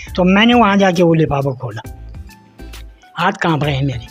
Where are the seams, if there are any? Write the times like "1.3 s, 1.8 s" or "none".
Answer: none